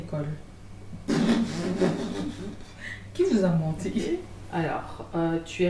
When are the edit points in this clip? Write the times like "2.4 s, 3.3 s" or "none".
4.5 s